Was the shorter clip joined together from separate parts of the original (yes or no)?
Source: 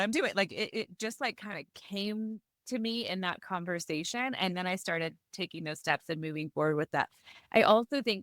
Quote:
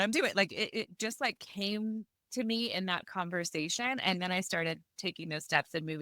yes